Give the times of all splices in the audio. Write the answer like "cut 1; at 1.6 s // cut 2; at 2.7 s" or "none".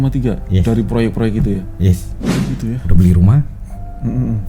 cut 1; at 2.1 s

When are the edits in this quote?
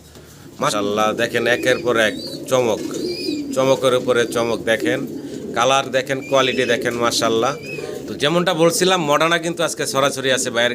cut 1; at 0.7 s // cut 2; at 8.0 s

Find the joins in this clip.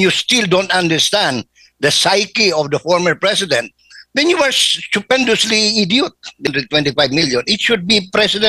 cut 1; at 6.5 s

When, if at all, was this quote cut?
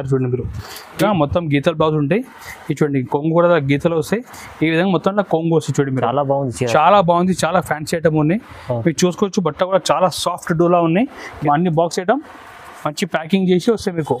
cut 1; at 1.0 s // cut 2; at 11.3 s

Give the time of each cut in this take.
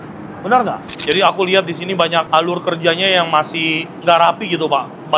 cut 1; at 0.9 s // cut 2; at 2.3 s

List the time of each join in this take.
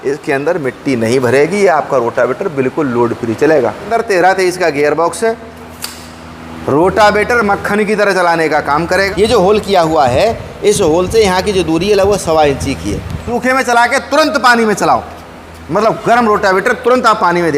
cut 1; at 3.9 s // cut 2; at 9.1 s // cut 3; at 13.2 s

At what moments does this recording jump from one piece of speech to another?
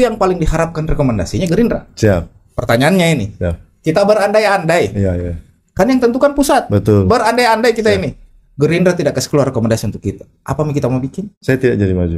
cut 1; at 11.3 s

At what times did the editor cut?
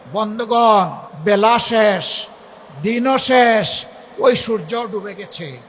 cut 1; at 1.0 s

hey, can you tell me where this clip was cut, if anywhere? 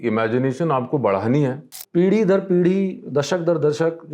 cut 1; at 1.8 s

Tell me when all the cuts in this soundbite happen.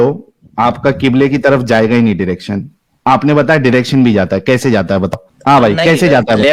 none

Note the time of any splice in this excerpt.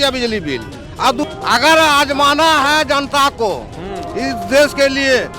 cut 1; at 1.2 s

